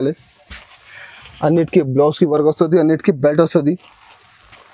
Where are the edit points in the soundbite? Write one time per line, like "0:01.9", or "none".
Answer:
none